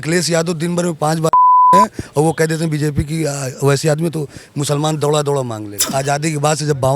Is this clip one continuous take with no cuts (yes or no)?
no